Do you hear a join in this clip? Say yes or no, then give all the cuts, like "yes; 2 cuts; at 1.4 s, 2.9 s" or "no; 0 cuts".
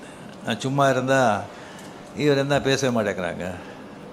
no; 0 cuts